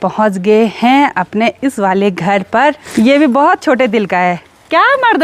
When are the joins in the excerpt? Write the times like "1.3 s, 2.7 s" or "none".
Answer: 2.8 s